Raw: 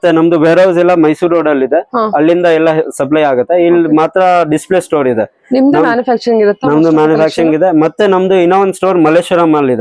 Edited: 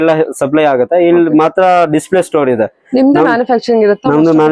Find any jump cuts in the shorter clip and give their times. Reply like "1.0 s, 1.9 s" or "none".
none